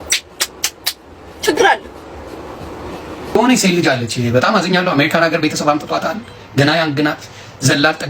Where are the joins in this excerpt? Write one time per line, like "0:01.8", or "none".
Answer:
0:03.4